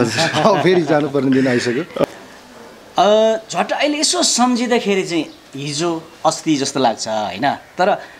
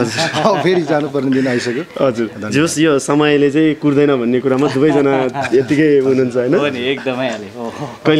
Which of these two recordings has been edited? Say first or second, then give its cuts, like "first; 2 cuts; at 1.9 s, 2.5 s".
first; 1 cut; at 2.0 s